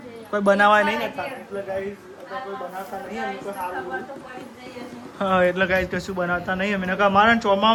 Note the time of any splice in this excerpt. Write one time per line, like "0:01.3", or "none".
none